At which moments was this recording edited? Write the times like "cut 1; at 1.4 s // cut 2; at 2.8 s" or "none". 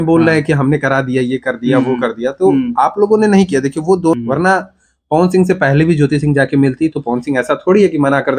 cut 1; at 4.1 s